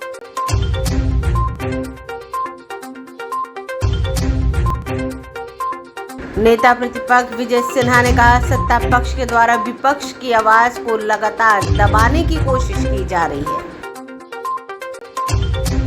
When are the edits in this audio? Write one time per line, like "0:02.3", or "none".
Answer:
0:02.3